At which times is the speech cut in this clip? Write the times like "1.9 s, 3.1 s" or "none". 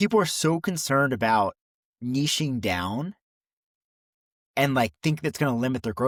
none